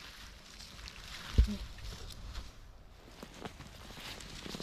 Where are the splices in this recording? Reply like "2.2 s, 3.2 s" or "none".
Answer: none